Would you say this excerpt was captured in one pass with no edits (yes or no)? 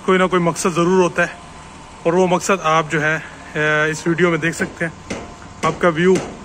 yes